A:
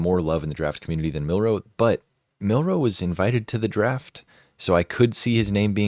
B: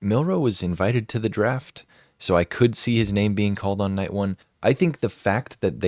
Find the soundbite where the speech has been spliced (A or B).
B